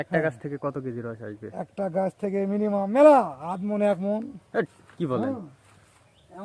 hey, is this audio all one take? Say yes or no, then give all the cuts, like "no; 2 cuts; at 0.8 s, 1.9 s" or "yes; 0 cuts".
yes; 0 cuts